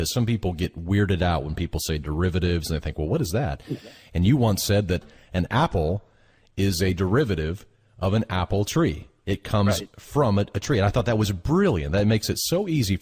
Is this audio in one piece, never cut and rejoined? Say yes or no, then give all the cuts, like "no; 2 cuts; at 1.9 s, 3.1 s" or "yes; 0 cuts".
yes; 0 cuts